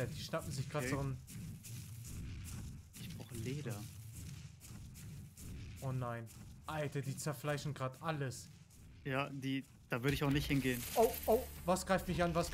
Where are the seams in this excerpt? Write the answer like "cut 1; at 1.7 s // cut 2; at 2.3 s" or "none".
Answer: none